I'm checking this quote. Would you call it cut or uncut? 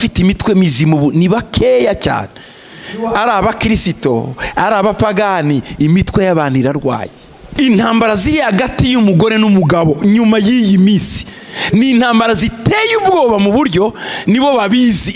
cut